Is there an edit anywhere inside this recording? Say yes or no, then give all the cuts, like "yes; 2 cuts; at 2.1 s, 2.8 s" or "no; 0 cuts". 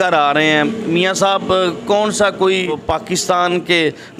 yes; 1 cut; at 2.8 s